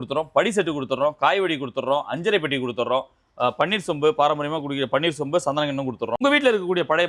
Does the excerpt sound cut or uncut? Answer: cut